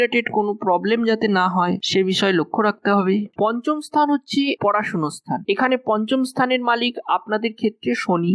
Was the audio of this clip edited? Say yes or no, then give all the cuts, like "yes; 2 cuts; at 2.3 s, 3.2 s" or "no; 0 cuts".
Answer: yes; 1 cut; at 3.3 s